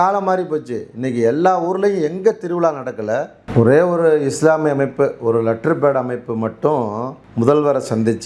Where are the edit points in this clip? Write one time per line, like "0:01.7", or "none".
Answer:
0:03.4
0:07.2